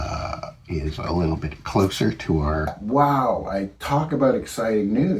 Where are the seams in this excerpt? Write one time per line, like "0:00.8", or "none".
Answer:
0:02.7